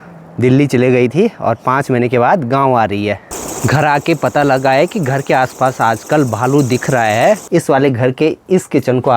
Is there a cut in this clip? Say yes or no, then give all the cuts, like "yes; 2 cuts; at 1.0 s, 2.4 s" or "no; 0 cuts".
yes; 2 cuts; at 3.3 s, 7.4 s